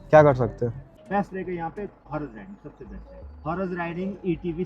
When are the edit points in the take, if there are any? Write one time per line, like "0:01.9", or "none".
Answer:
0:00.9
0:02.0
0:03.4